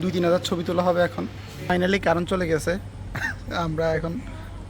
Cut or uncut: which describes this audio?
cut